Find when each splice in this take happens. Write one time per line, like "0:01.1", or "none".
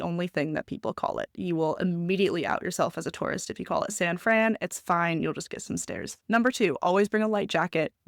none